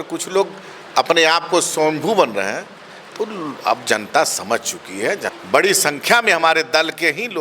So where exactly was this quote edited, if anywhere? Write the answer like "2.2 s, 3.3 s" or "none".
5.4 s